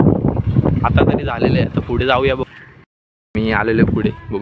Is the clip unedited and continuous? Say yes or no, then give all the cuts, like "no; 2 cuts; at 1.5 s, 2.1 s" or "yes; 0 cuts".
no; 1 cut; at 2.4 s